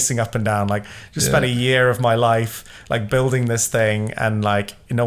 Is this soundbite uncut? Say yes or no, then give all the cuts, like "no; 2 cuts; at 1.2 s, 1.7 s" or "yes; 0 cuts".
yes; 0 cuts